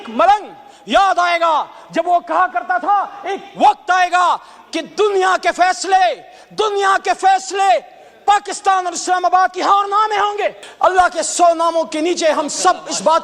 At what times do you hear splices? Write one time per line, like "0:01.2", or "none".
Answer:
0:10.6